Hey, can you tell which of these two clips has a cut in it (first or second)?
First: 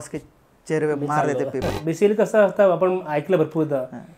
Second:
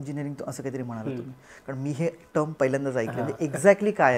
first